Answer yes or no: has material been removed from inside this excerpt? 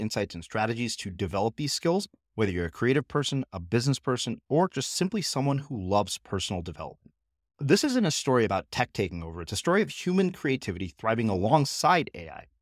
no